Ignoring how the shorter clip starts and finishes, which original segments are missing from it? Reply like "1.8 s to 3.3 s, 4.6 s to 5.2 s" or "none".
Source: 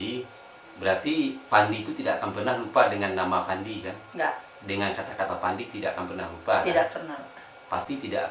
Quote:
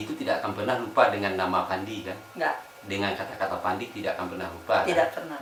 none